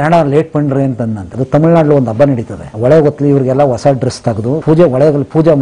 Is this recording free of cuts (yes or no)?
no